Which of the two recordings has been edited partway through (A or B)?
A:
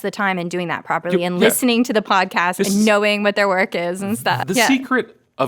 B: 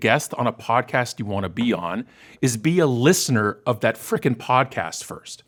A